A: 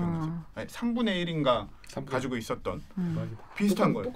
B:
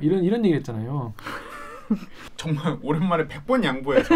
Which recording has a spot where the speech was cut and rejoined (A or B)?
B